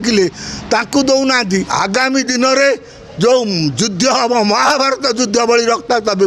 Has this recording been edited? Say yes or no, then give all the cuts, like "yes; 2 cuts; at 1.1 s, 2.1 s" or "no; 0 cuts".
yes; 1 cut; at 1.7 s